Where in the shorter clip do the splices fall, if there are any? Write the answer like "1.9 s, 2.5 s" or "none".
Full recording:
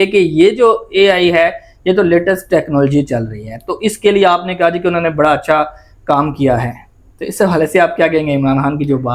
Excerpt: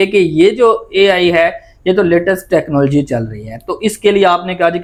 none